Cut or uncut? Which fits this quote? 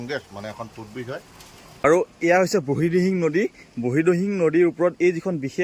cut